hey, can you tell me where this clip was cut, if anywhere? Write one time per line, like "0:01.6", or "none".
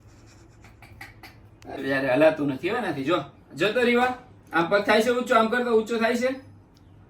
0:01.8